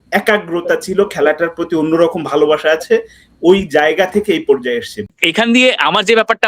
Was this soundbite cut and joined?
yes; 1 cut; at 5.2 s

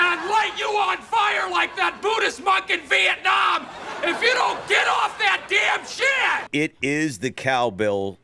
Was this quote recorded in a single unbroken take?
no; 1 cut; at 6.5 s

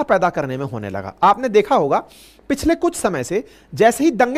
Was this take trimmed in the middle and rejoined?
no; 0 cuts

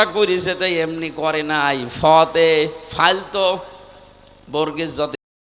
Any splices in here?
no; 0 cuts

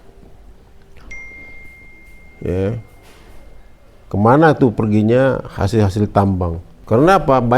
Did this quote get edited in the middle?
yes; 1 cut; at 6.7 s

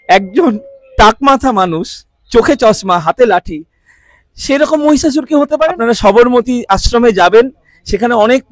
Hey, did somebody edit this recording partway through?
yes; 1 cut; at 5.7 s

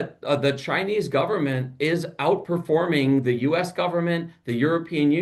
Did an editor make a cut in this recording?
no; 0 cuts

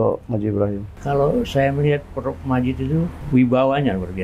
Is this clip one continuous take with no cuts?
yes; 0 cuts

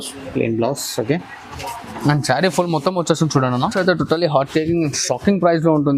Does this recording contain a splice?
yes; 1 cut; at 3.7 s

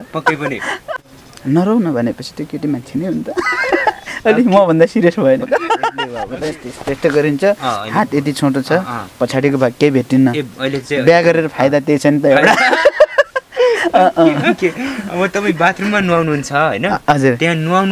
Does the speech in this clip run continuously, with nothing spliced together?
no; 2 cuts; at 0.8 s, 6.1 s

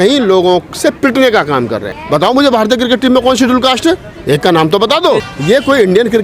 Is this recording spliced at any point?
yes; 2 cuts; at 2.0 s, 5.3 s

